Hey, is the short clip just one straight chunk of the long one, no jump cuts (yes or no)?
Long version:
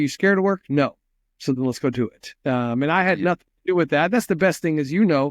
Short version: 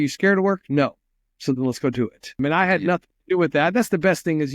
no